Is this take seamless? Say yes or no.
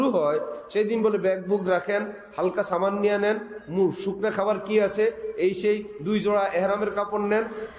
yes